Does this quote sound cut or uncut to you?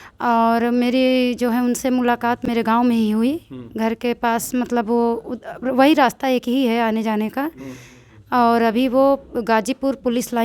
uncut